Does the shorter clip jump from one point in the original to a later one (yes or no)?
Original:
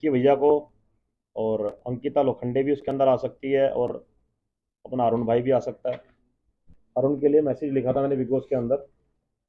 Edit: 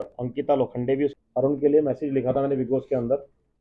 yes